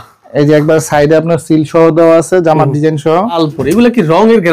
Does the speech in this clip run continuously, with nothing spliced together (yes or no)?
no